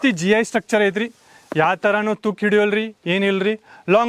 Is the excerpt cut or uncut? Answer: uncut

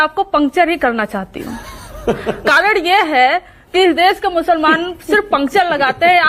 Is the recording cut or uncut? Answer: uncut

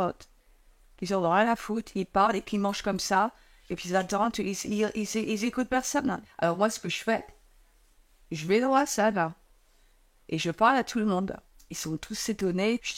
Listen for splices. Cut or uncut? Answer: uncut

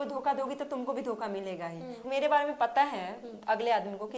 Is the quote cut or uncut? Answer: cut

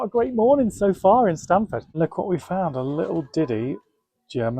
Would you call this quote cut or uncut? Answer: cut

